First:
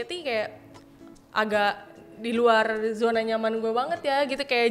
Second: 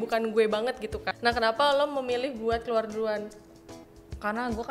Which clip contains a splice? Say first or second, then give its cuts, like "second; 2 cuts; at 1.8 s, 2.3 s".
second; 1 cut; at 1.0 s